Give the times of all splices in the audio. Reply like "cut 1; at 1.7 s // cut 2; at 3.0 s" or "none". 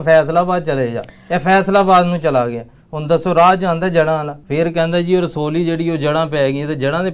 none